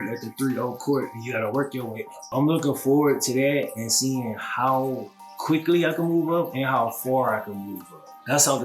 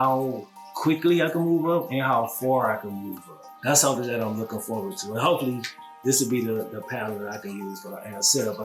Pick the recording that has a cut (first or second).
first